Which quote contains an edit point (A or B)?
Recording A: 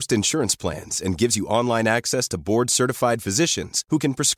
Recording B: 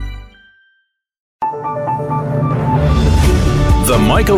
B